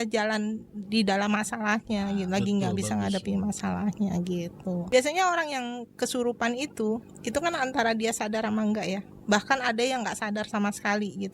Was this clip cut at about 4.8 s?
yes; 1 cut; at 4.8 s

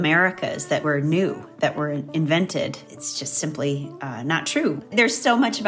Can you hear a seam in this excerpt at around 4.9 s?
yes; 2 cuts; at 2.9 s, 4.9 s

